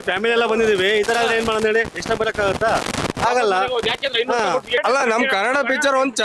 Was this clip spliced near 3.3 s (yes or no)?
no